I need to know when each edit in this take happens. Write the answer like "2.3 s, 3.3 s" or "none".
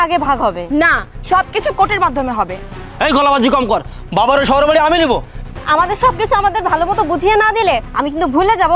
5.4 s